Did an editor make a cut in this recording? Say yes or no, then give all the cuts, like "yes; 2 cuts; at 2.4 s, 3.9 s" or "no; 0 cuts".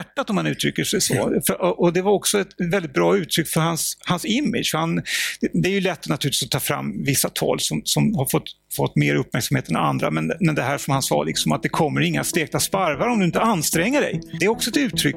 yes; 1 cut; at 14.3 s